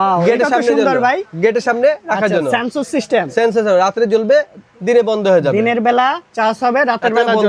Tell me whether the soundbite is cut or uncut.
uncut